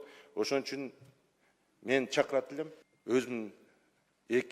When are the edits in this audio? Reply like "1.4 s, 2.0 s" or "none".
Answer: 2.9 s